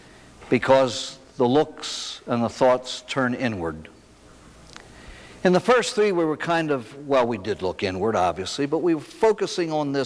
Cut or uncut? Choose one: uncut